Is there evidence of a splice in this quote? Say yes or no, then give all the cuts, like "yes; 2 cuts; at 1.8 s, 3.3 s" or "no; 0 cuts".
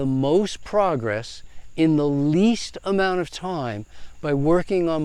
no; 0 cuts